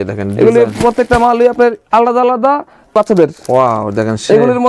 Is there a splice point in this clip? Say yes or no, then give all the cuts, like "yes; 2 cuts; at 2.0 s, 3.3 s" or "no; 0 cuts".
yes; 1 cut; at 2.9 s